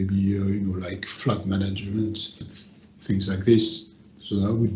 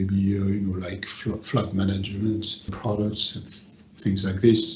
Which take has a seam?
first; 2 cuts; at 1.1 s, 2.4 s

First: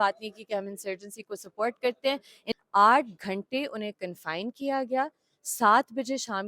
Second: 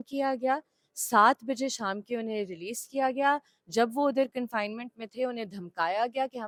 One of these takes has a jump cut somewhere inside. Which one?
first; 1 cut; at 2.5 s

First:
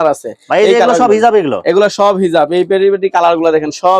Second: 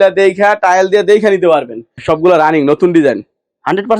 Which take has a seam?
second; 1 cut; at 2.0 s

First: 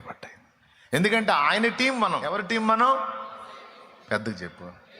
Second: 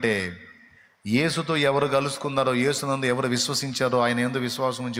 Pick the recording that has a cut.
first; 2 cuts; at 1.0 s, 2.3 s

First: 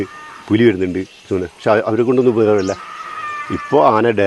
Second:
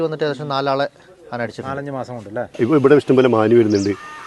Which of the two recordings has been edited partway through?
second; 1 cut; at 2.4 s

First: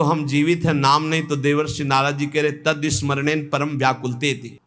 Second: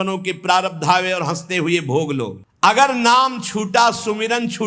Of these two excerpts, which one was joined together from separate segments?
second; 1 cut; at 2.4 s

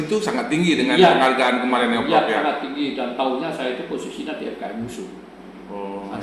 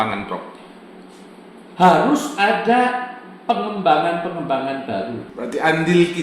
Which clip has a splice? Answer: second; 1 cut; at 5.2 s

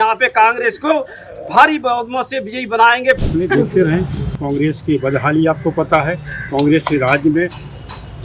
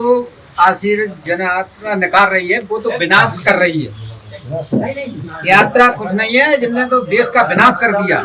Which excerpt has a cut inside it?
first; 1 cut; at 3.2 s

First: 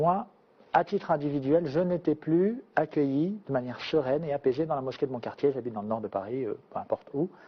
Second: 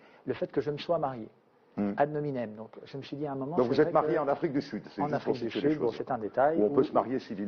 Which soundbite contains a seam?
first; 1 cut; at 2.7 s

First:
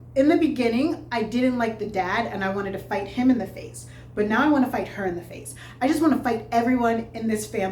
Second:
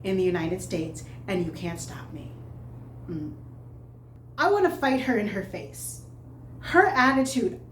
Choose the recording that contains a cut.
second; 1 cut; at 4.2 s

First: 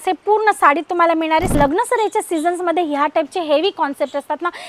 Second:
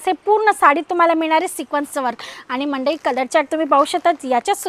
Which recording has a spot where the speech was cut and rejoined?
first; 1 cut; at 1.6 s

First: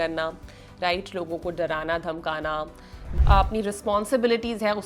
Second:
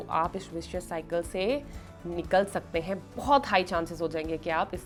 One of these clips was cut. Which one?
first; 1 cut; at 3.1 s

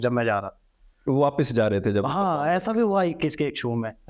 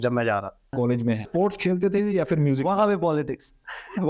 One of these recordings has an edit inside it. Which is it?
second; 1 cut; at 1.1 s

